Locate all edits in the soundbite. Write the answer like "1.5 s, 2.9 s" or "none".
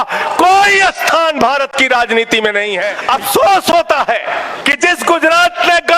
2.9 s, 4.6 s